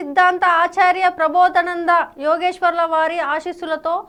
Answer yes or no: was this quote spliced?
no